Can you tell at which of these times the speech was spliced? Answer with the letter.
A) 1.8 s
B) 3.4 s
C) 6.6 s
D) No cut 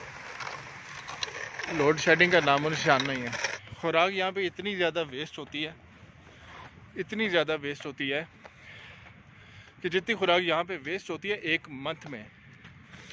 B